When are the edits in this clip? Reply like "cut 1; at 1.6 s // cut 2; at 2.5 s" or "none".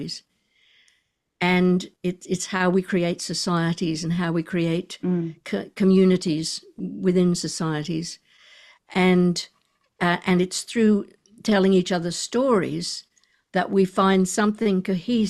none